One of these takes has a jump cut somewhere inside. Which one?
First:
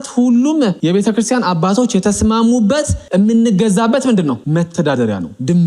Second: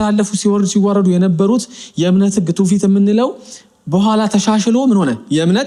first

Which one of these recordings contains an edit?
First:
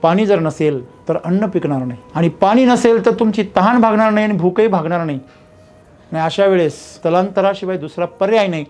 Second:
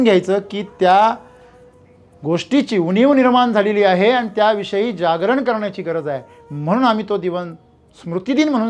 first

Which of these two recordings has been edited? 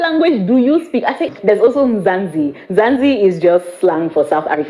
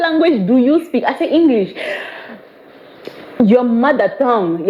first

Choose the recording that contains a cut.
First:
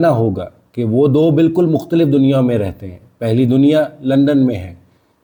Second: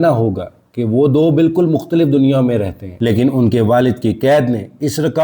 second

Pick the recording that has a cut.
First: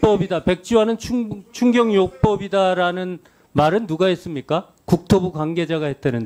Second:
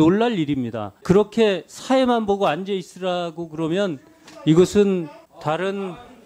second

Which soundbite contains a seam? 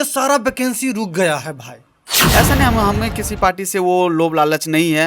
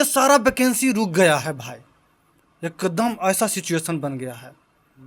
first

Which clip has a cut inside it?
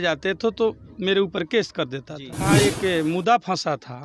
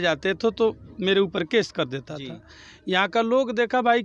first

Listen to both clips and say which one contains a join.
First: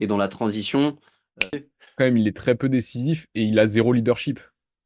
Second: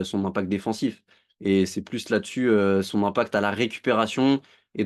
first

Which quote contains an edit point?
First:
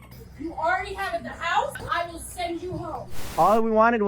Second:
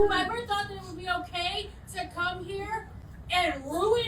first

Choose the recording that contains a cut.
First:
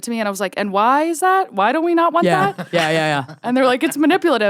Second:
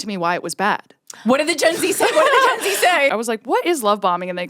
second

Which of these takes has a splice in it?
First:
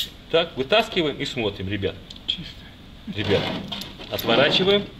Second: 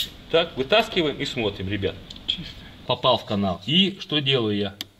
second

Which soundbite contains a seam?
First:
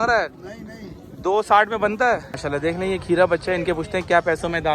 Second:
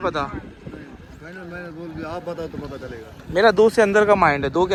first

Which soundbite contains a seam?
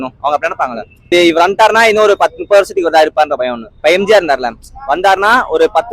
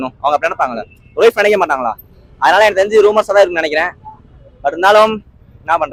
first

